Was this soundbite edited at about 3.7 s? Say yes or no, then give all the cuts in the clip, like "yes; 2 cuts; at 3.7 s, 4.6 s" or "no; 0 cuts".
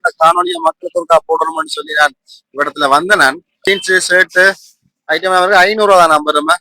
yes; 1 cut; at 3.7 s